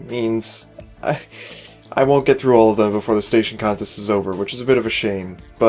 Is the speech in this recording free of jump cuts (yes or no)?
yes